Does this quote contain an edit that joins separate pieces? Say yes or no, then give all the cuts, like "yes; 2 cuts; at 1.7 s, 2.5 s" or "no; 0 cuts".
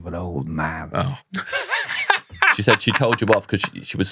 yes; 1 cut; at 1.2 s